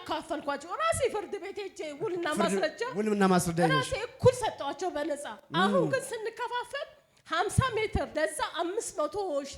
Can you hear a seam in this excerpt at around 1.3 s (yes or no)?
no